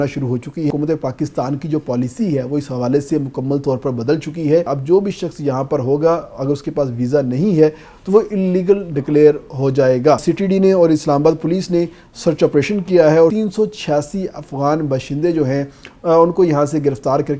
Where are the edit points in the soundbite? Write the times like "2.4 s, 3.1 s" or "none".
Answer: 0.7 s, 4.7 s, 10.3 s, 13.3 s

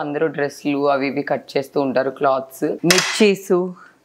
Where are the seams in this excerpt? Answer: 2.8 s

